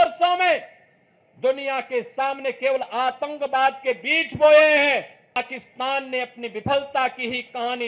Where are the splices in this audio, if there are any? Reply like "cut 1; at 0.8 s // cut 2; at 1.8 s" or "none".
cut 1; at 5.4 s